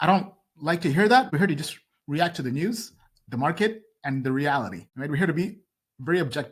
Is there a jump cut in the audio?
yes; 2 cuts; at 1.3 s, 4.9 s

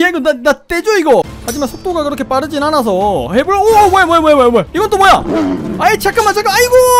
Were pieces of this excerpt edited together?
yes; 1 cut; at 1.4 s

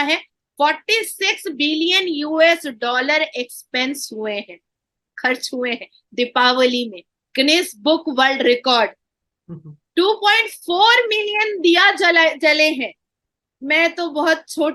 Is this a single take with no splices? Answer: yes; 0 cuts

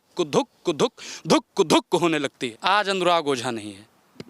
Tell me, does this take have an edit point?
yes; 1 cut; at 2.4 s

